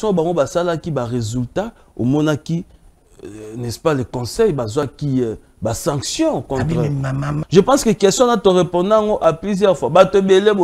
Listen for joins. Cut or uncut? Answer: cut